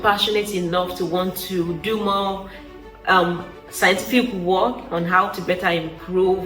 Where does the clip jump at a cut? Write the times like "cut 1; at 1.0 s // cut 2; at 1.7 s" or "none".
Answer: none